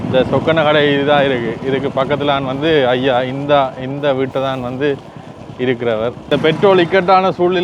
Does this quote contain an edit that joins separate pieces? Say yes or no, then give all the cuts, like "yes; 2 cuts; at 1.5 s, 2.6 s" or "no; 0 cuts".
yes; 1 cut; at 6.3 s